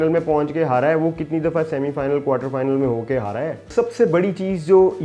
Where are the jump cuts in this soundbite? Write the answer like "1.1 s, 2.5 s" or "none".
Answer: 3.7 s